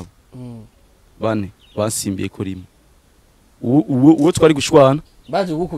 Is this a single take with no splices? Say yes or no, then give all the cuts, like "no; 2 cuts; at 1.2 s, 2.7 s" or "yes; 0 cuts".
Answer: yes; 0 cuts